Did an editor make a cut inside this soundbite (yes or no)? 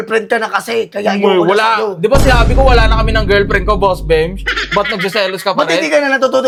no